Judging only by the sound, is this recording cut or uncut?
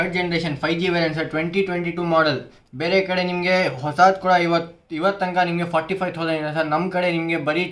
uncut